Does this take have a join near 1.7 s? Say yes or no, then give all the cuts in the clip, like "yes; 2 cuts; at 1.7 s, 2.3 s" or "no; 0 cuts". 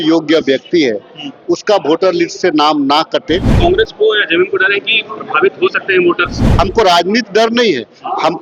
no; 2 cuts; at 3.6 s, 6.4 s